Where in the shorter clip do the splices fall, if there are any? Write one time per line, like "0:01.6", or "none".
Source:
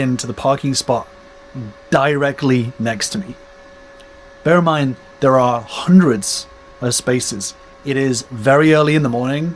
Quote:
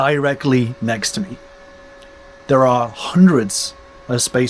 0:02.3